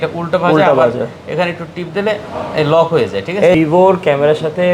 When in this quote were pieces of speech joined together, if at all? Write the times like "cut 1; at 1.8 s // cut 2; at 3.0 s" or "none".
cut 1; at 3.5 s